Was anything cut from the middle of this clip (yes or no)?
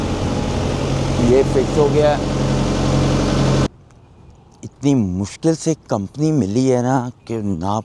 yes